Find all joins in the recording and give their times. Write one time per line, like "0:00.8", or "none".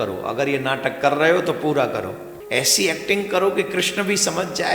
0:02.3